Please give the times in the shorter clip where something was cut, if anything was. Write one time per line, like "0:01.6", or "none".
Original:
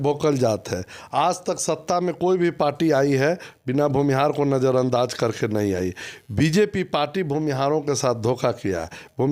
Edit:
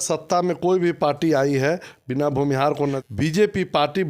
0:03.0